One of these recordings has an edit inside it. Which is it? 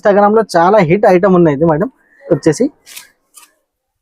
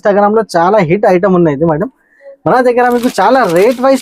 first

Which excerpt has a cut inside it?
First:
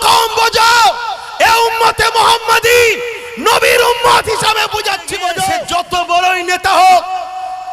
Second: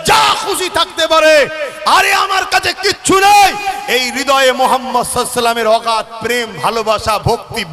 first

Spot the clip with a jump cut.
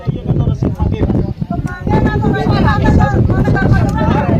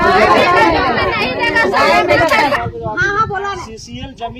second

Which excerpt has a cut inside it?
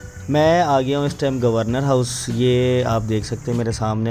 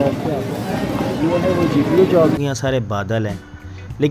second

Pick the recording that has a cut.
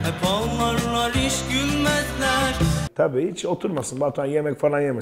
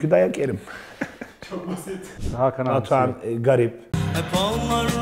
second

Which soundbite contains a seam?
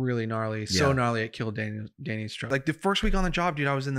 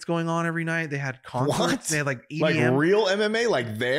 first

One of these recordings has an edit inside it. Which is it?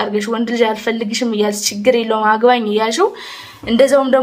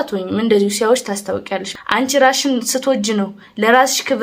second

